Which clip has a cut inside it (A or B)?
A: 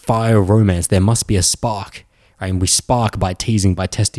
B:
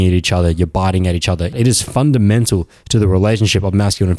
B